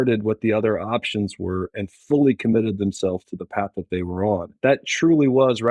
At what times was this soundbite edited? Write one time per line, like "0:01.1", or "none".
0:04.5